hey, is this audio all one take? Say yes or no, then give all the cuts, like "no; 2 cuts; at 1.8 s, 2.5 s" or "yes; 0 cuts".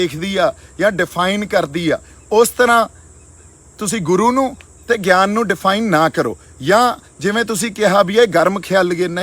yes; 0 cuts